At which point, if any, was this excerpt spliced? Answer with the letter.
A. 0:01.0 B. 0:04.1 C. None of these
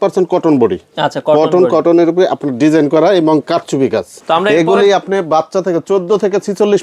B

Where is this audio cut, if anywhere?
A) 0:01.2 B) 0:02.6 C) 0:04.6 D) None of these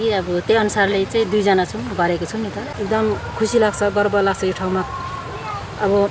B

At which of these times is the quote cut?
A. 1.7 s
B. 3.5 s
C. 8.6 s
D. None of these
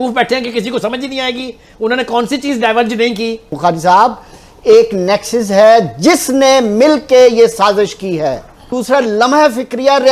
B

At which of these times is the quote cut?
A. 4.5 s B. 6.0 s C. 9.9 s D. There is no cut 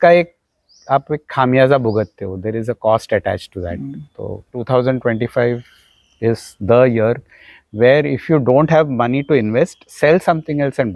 A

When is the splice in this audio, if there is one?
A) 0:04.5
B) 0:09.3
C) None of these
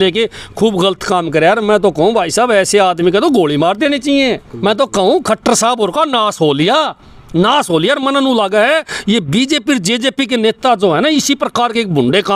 A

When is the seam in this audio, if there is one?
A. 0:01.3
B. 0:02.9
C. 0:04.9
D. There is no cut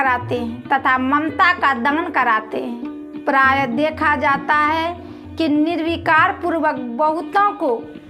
B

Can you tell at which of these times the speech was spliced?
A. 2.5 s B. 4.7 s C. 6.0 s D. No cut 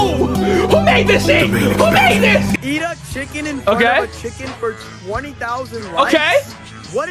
A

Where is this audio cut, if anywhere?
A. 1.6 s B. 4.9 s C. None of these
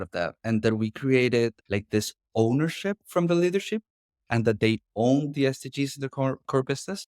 A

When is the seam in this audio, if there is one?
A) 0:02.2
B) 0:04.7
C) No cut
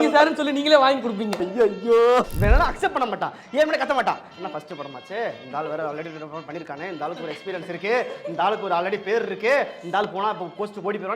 A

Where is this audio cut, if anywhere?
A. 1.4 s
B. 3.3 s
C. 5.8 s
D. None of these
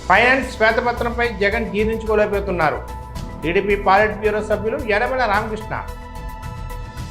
C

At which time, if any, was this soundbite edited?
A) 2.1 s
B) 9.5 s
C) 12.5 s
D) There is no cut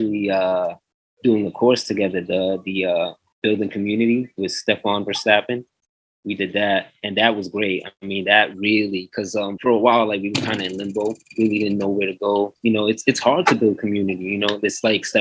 B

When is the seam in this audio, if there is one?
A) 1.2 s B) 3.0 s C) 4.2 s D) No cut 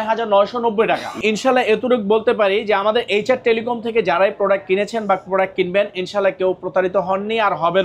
A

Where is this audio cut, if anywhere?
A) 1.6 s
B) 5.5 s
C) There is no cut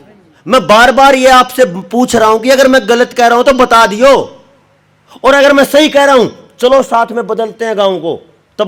C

